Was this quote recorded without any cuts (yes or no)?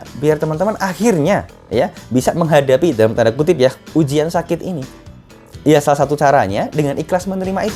yes